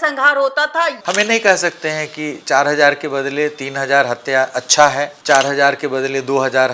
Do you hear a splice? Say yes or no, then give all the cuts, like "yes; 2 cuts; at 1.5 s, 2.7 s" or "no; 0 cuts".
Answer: yes; 1 cut; at 1.0 s